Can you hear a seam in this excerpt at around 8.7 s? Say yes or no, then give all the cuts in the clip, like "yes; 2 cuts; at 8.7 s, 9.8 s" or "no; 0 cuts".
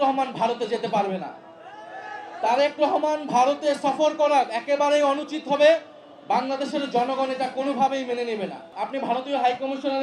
yes; 1 cut; at 8.7 s